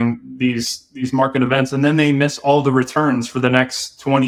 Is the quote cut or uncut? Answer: uncut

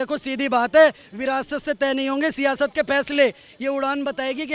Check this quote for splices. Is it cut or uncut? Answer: uncut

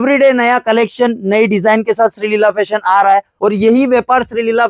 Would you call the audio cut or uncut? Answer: cut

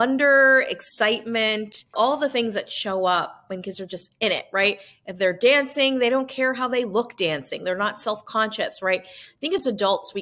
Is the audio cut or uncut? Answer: cut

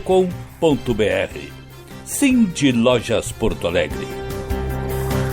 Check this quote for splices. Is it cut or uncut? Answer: cut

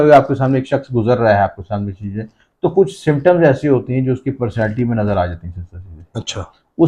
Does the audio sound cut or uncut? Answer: uncut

